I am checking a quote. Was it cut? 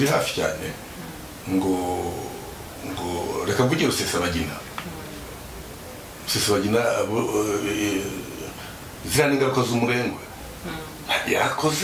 no; 0 cuts

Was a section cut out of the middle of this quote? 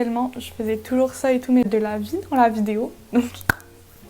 yes; 1 cut; at 1.7 s

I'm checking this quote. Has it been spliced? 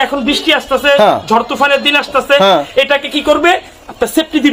no; 0 cuts

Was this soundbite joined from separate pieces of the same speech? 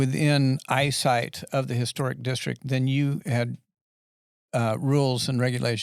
no; 0 cuts

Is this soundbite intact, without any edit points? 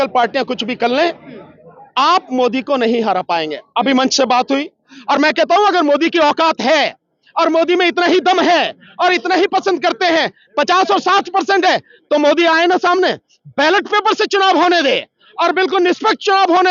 no; 1 cut; at 4.9 s

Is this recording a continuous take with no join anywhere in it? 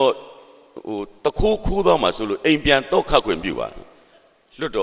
yes; 0 cuts

